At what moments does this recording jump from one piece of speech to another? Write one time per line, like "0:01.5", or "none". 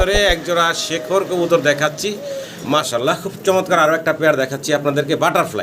0:02.9